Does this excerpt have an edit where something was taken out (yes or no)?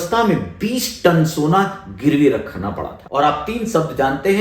yes